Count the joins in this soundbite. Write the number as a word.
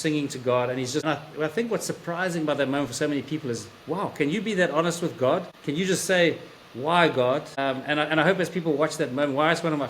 three